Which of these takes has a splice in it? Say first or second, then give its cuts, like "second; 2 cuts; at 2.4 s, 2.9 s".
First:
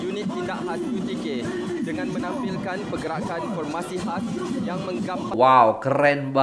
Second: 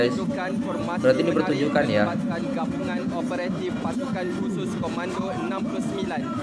first; 1 cut; at 5.3 s